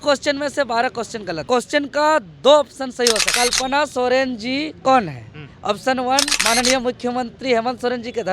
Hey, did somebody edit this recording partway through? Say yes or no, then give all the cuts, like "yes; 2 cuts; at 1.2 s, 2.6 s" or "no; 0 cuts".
yes; 2 cuts; at 1.5 s, 3.3 s